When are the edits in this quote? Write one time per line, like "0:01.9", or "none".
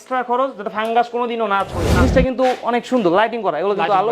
0:01.9